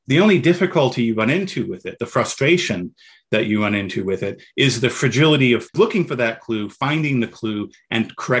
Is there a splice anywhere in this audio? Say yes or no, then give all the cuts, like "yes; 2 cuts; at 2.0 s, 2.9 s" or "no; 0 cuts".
yes; 1 cut; at 5.7 s